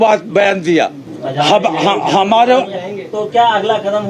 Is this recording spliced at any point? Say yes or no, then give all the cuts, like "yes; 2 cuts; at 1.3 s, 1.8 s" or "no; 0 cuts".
no; 0 cuts